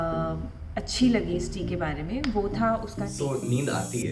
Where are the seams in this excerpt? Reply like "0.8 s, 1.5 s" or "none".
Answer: 3.1 s